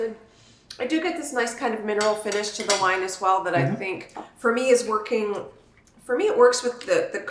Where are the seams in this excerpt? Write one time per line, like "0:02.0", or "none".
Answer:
none